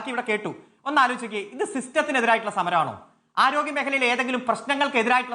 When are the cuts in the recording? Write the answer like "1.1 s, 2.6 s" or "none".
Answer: none